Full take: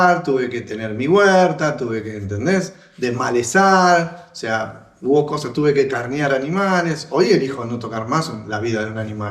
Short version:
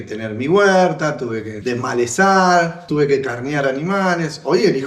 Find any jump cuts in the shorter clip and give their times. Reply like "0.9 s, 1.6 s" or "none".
1.5 s, 2.8 s